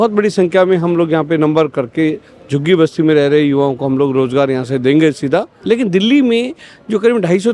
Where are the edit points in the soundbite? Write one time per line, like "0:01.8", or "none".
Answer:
0:05.5